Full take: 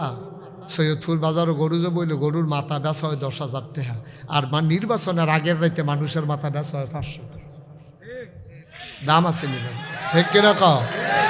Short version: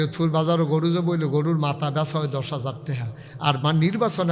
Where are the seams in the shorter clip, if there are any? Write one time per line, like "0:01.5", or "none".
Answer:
none